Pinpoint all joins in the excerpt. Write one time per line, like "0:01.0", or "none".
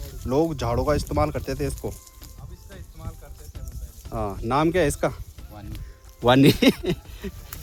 none